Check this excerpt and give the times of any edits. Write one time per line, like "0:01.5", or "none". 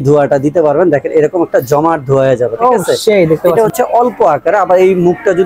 0:03.5